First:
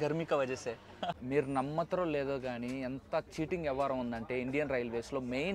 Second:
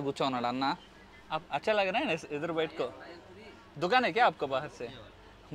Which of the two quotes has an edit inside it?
first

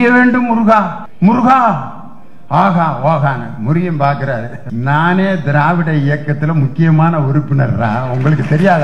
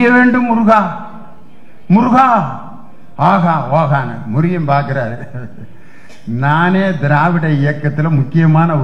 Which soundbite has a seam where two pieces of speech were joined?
first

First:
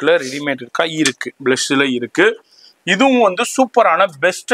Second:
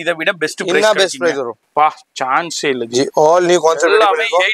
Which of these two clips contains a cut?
second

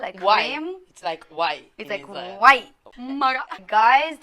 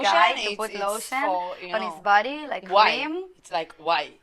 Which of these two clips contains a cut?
first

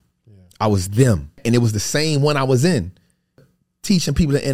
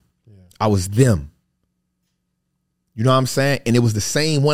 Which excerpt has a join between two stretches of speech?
first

